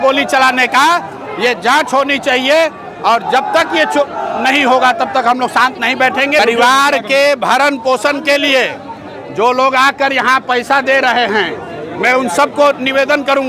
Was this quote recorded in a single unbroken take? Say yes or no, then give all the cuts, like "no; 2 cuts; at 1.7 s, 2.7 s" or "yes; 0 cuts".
no; 1 cut; at 6.4 s